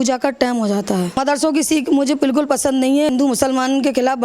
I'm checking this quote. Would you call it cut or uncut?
cut